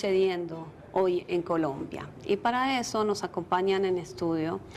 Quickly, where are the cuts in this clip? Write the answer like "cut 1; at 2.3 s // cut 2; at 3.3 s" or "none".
cut 1; at 1.3 s